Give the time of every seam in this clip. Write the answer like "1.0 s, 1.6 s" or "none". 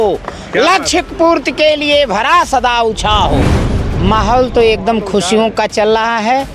3.9 s